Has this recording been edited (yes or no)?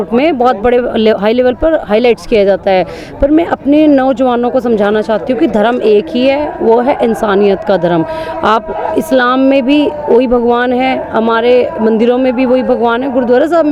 no